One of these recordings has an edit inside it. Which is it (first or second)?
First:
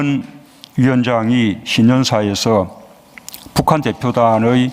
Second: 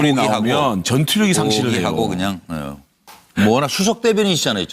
first